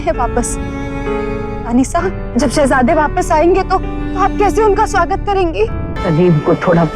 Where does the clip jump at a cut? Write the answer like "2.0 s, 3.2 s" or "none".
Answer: 5.9 s